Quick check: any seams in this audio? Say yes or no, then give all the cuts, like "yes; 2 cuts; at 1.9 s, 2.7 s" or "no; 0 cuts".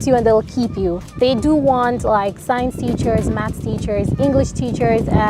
no; 0 cuts